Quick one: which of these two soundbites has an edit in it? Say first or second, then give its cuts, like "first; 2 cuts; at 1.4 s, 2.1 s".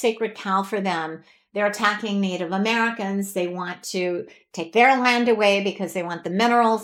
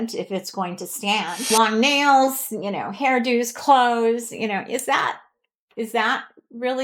second; 1 cut; at 1.5 s